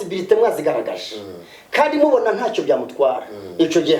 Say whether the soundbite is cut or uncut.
uncut